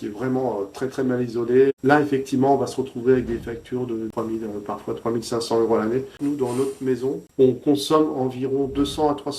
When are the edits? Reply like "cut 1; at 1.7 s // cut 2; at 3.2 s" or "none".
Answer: cut 1; at 4.1 s // cut 2; at 6.2 s // cut 3; at 7.2 s